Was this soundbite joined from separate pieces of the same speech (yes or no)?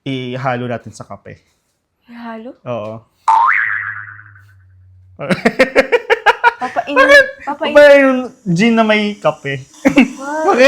yes